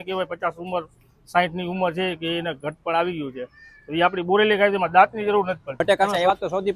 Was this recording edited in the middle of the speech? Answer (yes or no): yes